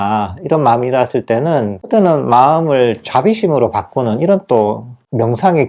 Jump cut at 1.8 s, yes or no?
yes